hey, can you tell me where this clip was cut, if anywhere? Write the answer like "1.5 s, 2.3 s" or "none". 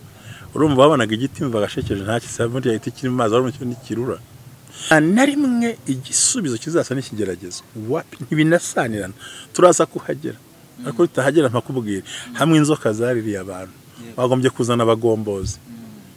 none